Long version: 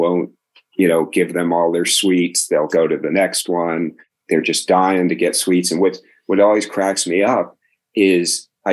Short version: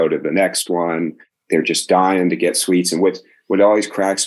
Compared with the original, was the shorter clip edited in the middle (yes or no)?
no